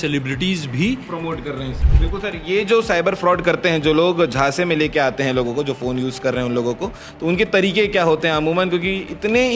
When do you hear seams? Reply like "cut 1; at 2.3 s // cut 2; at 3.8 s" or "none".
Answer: cut 1; at 1.8 s